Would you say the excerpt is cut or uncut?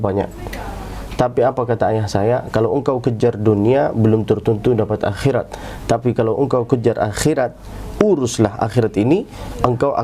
uncut